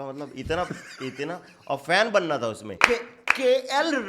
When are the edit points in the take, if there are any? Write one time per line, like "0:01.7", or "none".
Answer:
0:02.7